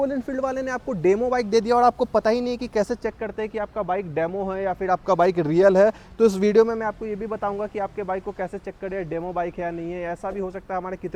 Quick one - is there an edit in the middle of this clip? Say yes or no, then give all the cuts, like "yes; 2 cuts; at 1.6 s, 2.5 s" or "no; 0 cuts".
no; 0 cuts